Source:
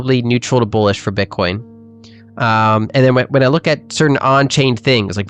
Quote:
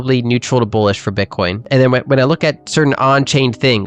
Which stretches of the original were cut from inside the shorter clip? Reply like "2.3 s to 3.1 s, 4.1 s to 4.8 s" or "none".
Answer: 1.6 s to 2.9 s

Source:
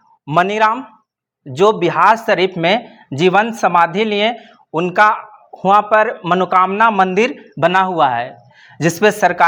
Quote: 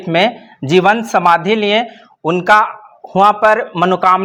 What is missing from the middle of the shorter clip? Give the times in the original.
none

